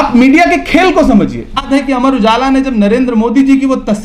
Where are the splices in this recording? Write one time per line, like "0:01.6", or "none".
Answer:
0:01.7